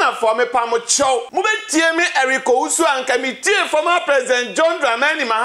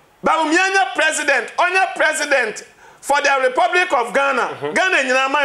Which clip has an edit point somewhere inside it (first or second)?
first